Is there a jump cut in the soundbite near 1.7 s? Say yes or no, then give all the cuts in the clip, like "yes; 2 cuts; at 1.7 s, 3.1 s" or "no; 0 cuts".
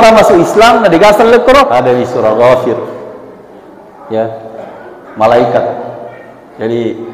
yes; 1 cut; at 1.7 s